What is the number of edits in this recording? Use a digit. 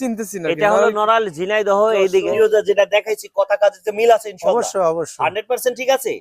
1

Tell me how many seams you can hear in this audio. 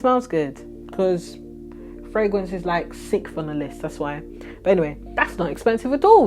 1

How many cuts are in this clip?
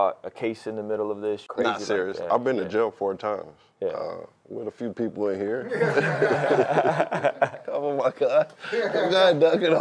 1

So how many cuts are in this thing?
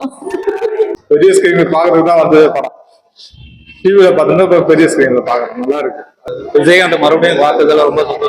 2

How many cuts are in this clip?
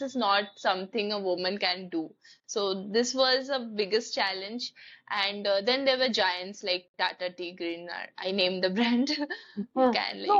0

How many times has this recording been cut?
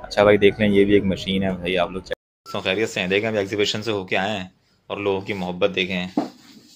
1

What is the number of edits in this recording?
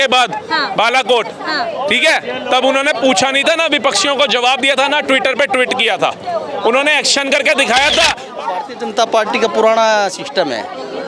1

